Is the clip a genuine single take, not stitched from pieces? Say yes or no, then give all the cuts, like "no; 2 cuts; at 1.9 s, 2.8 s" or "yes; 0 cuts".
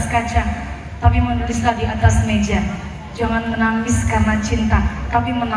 yes; 0 cuts